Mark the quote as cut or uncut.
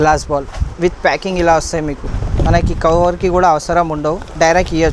cut